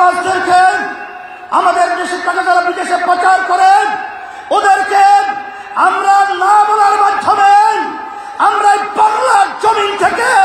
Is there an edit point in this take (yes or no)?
no